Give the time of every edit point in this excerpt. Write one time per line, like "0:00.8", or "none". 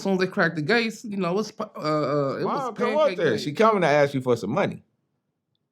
0:02.7